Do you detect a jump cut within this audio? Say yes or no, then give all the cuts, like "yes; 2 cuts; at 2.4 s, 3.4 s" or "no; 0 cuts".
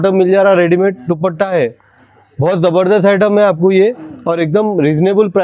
no; 0 cuts